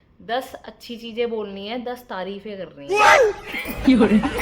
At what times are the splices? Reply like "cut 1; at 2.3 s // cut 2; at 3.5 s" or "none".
none